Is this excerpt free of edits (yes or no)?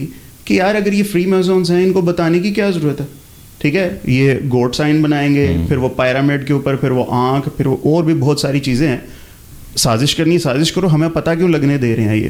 yes